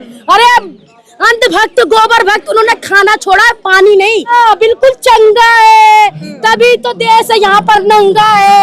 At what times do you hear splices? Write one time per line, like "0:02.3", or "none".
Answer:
0:04.3